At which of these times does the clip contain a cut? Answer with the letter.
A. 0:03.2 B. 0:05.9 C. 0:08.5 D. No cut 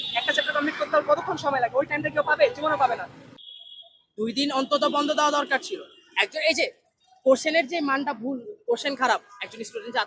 A